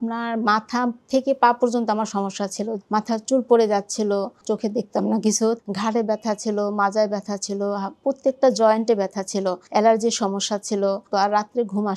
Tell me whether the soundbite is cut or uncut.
cut